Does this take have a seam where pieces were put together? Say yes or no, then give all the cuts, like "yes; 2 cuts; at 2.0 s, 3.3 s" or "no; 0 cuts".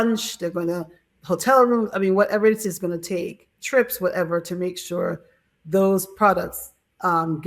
no; 0 cuts